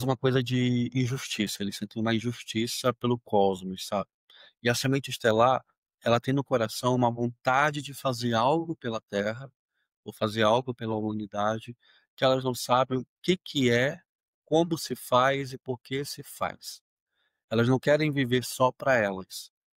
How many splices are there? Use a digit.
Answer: 0